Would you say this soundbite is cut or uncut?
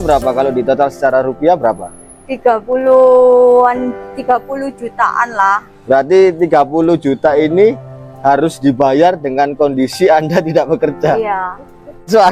uncut